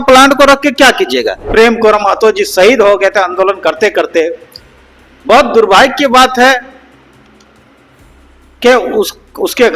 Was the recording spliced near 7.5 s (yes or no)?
no